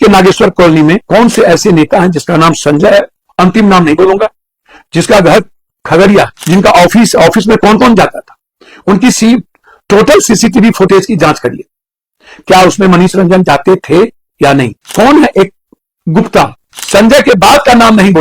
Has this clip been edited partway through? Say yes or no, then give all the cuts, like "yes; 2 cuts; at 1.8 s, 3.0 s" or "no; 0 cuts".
yes; 2 cuts; at 1.0 s, 16.7 s